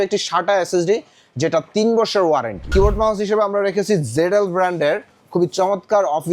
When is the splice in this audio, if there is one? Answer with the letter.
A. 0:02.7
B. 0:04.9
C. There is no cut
A